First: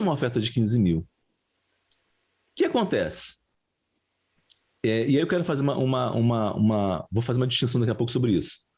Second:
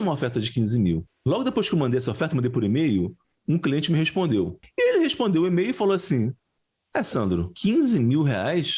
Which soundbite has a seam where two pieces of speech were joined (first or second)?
second